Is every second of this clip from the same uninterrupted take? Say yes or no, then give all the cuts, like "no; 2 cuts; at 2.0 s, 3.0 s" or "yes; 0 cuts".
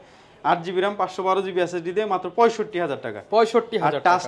yes; 0 cuts